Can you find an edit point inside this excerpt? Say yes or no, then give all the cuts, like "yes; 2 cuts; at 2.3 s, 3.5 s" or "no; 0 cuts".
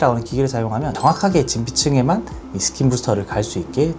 no; 0 cuts